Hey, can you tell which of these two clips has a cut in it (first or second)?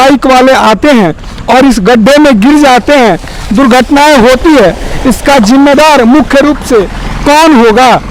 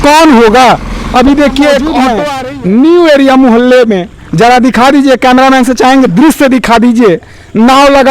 second